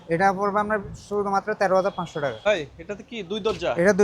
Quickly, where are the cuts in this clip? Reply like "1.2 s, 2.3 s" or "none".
2.4 s